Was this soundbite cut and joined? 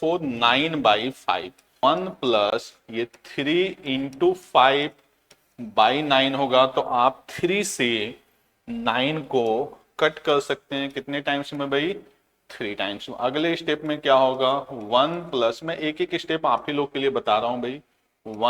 yes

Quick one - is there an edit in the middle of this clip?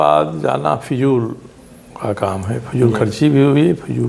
no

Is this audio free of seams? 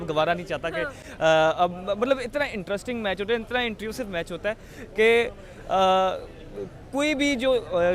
yes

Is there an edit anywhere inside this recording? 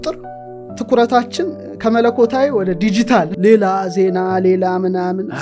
yes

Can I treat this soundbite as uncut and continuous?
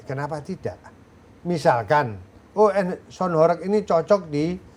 yes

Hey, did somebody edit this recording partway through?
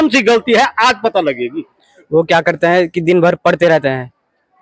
no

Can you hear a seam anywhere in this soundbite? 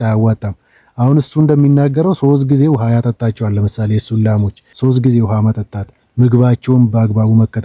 yes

